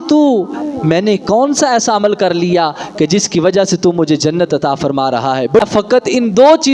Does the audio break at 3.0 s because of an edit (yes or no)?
no